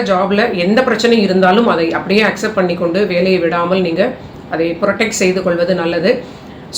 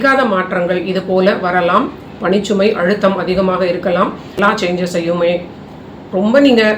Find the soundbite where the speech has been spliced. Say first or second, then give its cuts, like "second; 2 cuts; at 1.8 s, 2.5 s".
second; 1 cut; at 4.4 s